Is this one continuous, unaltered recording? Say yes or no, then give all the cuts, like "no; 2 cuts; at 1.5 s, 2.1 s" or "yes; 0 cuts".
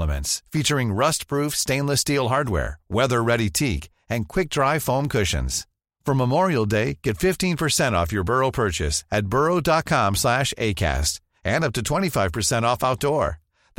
yes; 0 cuts